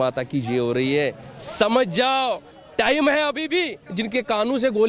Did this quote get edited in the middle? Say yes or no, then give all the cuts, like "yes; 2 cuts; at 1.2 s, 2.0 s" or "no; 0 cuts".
yes; 1 cut; at 3.8 s